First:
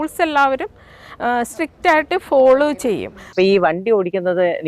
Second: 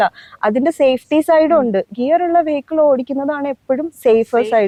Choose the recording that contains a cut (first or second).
first